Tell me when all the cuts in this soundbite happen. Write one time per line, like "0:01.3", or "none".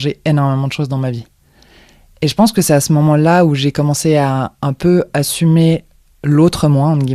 none